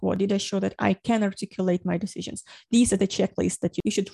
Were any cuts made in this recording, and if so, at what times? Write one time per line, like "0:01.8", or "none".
none